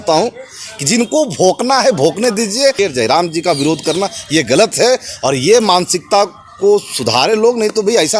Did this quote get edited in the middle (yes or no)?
yes